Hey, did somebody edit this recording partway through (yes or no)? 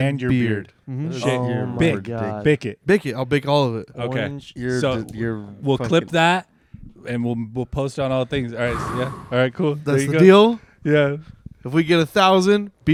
no